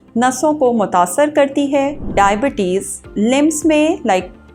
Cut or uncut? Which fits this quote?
cut